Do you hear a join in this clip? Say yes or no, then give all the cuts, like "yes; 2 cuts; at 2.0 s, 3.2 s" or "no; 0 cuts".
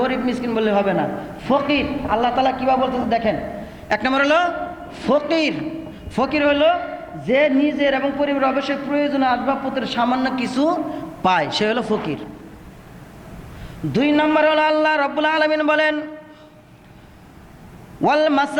no; 0 cuts